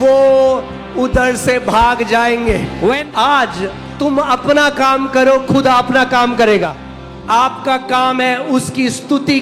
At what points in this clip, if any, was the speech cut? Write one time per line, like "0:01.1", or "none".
0:03.0
0:06.8